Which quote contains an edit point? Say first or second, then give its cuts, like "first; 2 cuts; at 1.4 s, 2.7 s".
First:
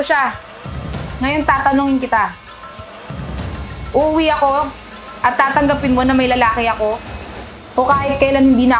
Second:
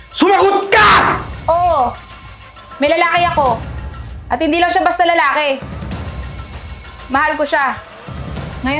second; 1 cut; at 1.3 s